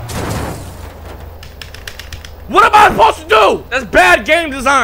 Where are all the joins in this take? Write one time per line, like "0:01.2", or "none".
none